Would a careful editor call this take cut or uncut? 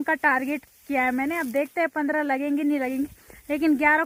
uncut